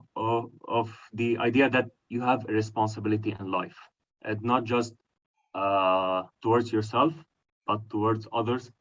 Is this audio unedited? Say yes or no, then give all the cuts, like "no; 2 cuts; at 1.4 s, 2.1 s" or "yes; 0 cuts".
yes; 0 cuts